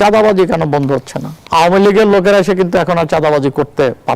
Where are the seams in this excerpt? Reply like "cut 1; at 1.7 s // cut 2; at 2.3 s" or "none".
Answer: cut 1; at 1.4 s